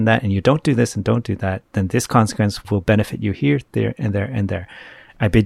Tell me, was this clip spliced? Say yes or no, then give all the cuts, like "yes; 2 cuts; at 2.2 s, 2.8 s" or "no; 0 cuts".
yes; 1 cut; at 2.7 s